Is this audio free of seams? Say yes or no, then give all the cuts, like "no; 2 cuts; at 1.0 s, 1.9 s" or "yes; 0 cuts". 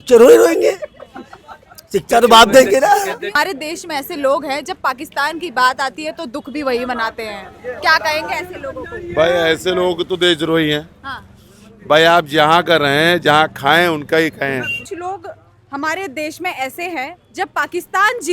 no; 2 cuts; at 3.3 s, 14.9 s